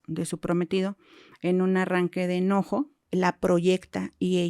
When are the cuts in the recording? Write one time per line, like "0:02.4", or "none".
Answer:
0:03.0